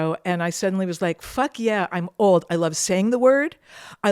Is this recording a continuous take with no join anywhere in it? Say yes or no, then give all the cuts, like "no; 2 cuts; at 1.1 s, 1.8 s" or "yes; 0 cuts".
no; 1 cut; at 1.2 s